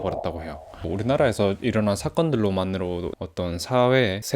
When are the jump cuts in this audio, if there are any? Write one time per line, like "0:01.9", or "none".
0:00.9